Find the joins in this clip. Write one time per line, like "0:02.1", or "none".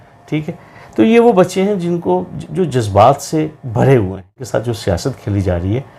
0:04.4

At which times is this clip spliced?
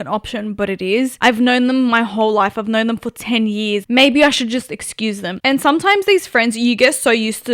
0:01.1
0:03.8
0:05.3

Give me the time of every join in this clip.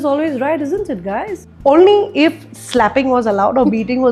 0:01.4

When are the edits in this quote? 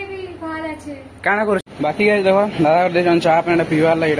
0:01.7

